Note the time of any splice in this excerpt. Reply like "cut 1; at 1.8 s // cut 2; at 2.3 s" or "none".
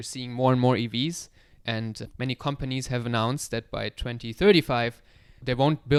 none